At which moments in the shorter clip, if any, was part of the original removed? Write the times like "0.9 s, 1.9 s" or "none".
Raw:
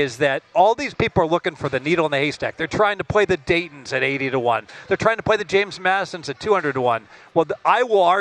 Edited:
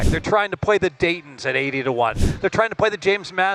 none

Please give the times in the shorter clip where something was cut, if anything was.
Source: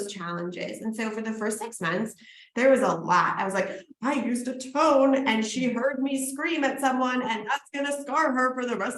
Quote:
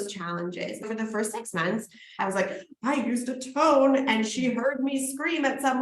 0.8 s, 2.2 s

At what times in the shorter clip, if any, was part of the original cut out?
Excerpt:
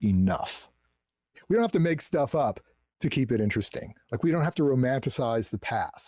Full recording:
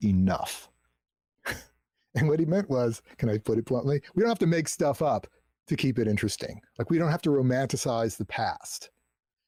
1.4 s

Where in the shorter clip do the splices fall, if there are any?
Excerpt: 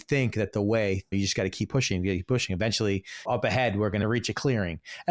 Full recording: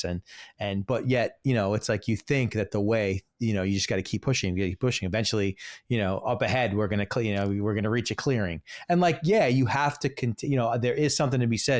1.1 s, 3.2 s, 4.0 s

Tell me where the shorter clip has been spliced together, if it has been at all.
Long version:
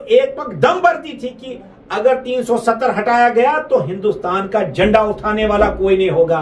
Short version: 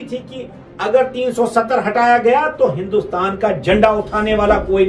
none

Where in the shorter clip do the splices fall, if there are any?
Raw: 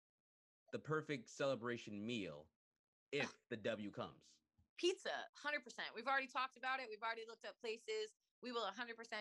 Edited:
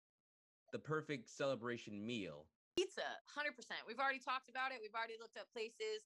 2.8 s

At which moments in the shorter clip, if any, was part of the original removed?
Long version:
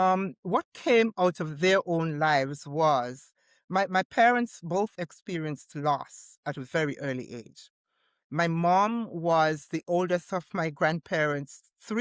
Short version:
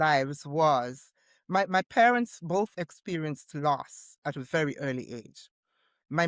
none

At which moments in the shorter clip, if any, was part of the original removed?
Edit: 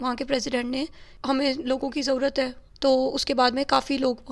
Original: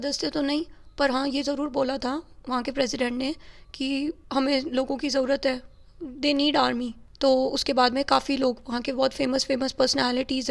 1.1 s, 2.6 s

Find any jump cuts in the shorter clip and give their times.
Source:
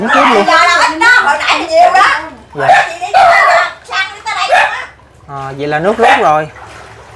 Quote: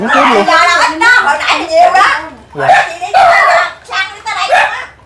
none

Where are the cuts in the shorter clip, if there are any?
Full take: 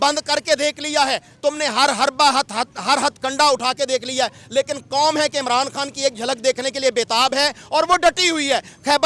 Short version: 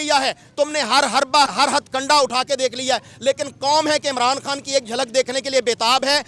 1.5 s

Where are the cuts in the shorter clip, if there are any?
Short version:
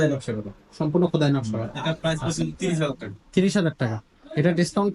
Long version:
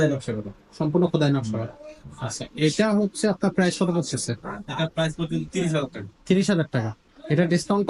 1.7 s

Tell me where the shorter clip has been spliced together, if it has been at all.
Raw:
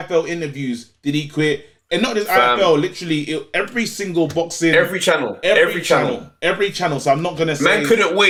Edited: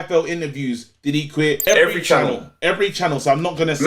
1.6 s

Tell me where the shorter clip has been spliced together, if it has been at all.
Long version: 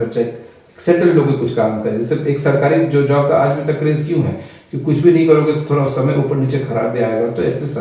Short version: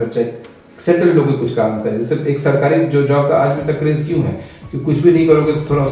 none

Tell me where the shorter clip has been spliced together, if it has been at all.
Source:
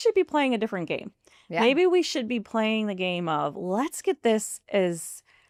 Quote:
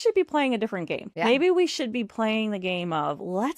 1.0 s

